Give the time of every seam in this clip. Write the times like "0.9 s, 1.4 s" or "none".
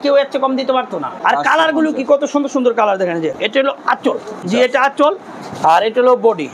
1.0 s, 3.3 s, 4.4 s